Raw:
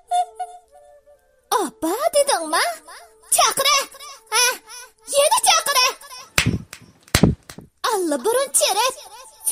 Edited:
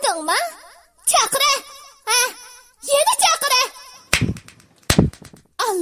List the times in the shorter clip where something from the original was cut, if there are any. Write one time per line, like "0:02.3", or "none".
none